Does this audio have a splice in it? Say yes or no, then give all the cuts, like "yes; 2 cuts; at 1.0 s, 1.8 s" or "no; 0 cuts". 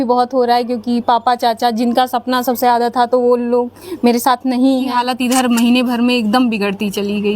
yes; 1 cut; at 4.9 s